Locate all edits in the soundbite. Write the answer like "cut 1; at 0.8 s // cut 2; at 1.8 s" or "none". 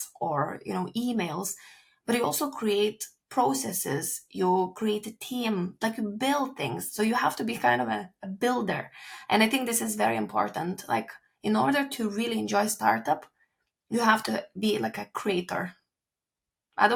none